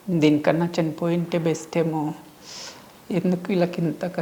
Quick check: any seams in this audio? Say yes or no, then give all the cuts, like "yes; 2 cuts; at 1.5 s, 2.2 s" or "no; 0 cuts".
no; 0 cuts